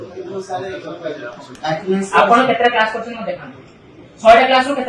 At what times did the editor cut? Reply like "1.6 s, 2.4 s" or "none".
1.4 s